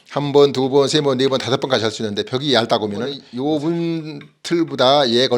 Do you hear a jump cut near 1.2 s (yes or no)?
no